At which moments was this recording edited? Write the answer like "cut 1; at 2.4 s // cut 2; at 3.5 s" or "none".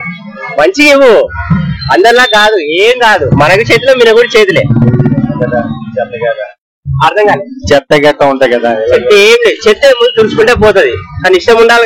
none